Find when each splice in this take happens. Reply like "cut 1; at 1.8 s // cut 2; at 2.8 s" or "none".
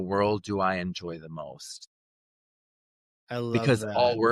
none